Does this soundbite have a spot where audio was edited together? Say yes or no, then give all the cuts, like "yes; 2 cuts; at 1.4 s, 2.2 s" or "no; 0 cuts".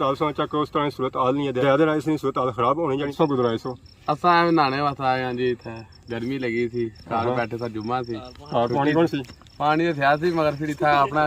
yes; 1 cut; at 3.1 s